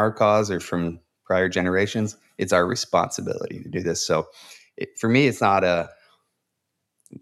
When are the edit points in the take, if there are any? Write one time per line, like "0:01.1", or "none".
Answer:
none